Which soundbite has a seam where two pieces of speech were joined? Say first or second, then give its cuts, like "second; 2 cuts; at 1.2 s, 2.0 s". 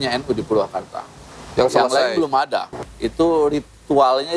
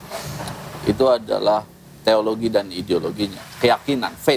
first; 1 cut; at 2.7 s